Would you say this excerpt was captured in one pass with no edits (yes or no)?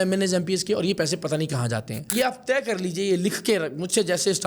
no